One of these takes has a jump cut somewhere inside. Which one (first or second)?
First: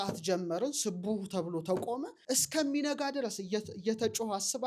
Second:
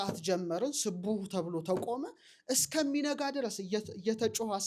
first